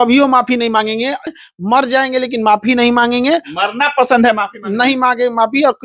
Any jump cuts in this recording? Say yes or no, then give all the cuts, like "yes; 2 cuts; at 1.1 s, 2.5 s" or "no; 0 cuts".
yes; 1 cut; at 1.4 s